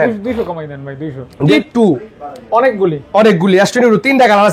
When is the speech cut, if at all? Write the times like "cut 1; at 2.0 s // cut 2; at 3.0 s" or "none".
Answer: cut 1; at 1.5 s